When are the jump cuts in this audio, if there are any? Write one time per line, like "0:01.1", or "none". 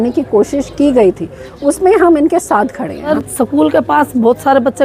0:03.1